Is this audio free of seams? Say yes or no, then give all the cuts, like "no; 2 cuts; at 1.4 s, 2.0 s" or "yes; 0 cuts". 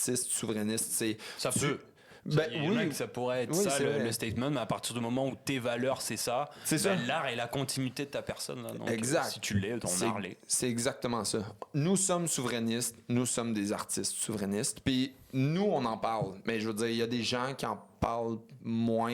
yes; 0 cuts